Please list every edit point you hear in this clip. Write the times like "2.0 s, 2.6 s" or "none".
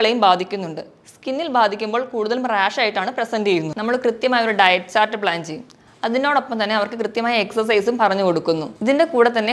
3.7 s